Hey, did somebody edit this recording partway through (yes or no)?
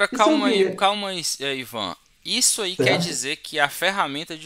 no